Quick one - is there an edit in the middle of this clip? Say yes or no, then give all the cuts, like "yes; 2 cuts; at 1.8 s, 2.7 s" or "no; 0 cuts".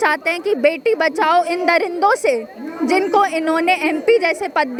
no; 0 cuts